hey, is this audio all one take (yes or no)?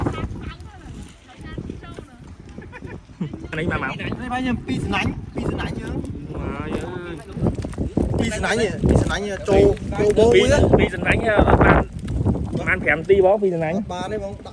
no